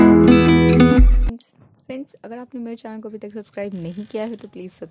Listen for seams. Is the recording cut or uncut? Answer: cut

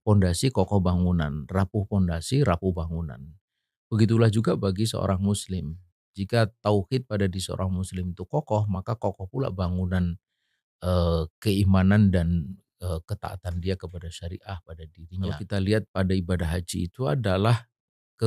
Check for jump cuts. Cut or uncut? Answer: cut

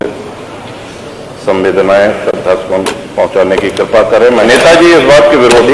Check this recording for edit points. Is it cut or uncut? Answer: cut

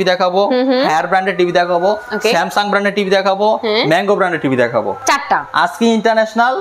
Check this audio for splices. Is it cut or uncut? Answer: cut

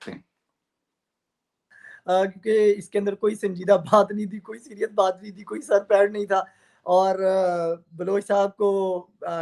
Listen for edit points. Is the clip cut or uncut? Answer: cut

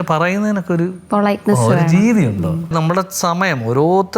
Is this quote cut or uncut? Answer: cut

